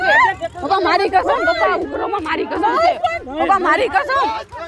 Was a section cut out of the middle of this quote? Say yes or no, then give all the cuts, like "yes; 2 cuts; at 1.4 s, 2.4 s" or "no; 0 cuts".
no; 0 cuts